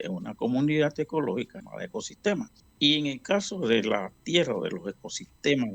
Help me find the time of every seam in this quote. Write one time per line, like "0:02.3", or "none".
0:01.6
0:02.6